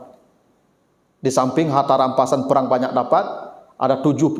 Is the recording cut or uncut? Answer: uncut